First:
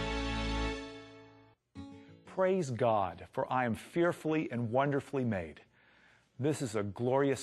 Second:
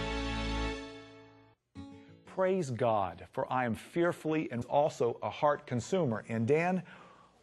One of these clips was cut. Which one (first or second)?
first